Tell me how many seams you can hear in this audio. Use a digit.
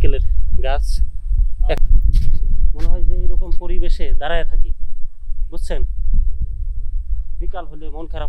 1